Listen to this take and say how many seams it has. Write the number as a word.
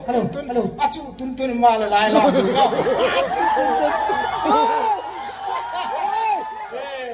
zero